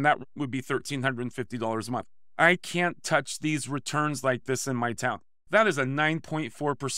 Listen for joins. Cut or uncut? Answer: cut